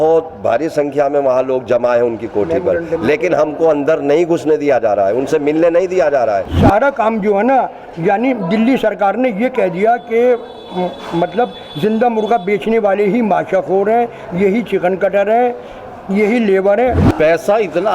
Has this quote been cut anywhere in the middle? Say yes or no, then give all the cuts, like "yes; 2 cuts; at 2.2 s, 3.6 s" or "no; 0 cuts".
yes; 2 cuts; at 6.5 s, 17.0 s